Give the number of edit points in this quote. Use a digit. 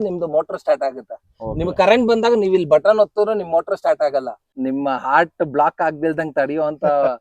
1